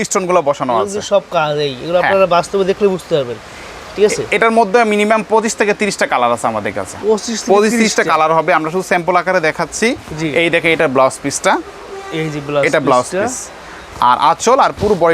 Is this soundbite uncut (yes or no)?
yes